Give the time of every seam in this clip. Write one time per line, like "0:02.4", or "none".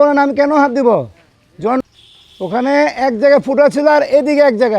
0:01.8